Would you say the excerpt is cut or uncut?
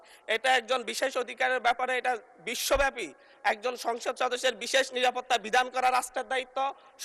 uncut